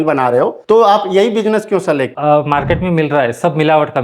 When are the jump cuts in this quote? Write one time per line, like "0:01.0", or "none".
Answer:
0:02.1